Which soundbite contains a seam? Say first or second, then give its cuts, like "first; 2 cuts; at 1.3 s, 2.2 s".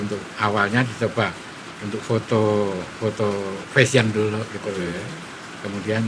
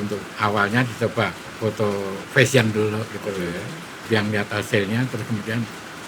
second; 2 cuts; at 1.5 s, 4.1 s